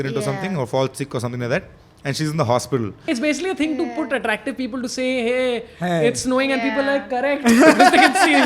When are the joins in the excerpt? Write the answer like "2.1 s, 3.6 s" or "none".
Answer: 3.0 s